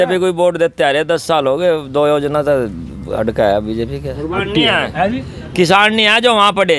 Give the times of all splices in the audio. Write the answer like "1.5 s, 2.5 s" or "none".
4.4 s